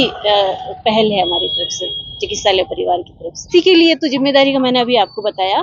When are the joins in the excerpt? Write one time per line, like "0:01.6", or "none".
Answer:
0:03.5